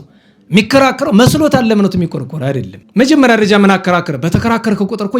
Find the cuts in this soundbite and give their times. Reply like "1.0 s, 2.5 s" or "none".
2.7 s